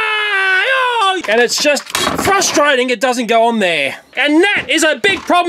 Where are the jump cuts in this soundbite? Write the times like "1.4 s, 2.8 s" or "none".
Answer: 1.2 s, 4.2 s